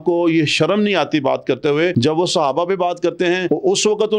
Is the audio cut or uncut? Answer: cut